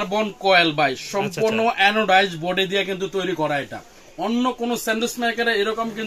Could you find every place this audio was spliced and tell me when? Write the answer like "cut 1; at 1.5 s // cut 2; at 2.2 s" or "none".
none